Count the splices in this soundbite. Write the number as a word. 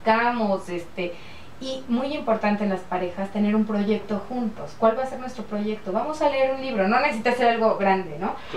zero